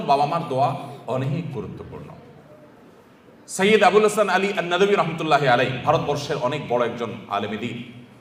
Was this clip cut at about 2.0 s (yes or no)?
no